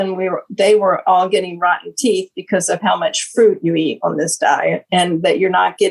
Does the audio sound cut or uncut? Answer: uncut